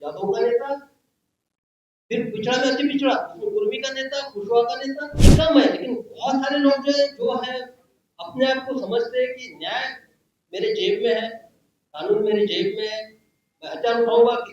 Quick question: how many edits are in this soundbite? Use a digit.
1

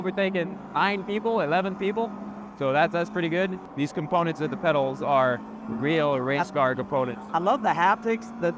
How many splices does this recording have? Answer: 1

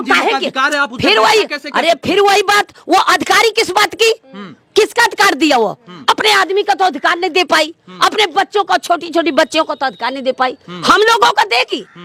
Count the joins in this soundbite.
0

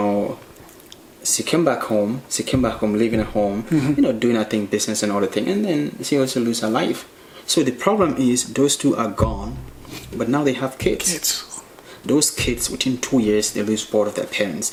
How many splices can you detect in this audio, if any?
0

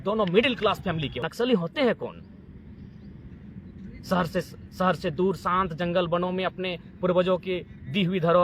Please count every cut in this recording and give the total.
1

